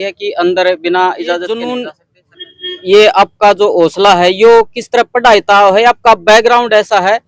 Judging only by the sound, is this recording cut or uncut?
cut